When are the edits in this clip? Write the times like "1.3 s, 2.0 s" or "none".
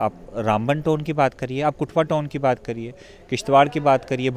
none